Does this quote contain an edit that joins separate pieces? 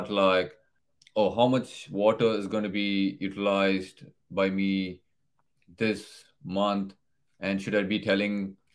no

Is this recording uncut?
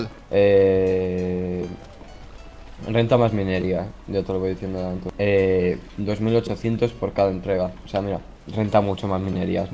no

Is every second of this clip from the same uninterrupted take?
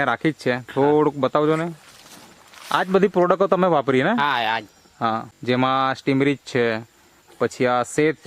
no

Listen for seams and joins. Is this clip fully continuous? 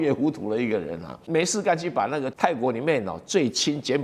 no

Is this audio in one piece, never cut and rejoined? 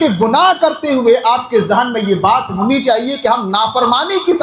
yes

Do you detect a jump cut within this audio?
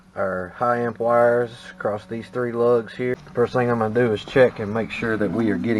yes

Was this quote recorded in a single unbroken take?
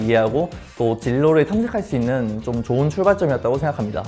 yes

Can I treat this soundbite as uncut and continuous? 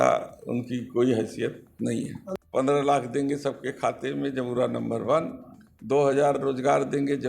no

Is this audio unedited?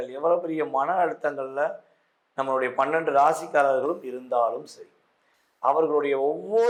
yes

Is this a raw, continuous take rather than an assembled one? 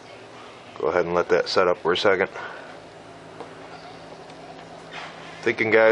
yes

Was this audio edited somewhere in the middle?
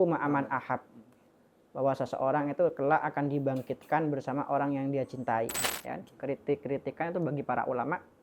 yes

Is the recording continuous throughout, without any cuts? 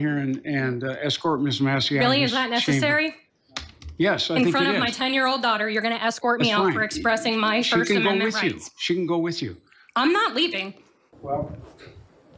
yes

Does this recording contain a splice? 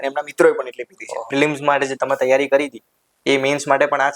yes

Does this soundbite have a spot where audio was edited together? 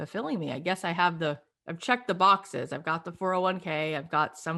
no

